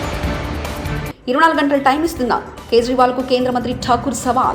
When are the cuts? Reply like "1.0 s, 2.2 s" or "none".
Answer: none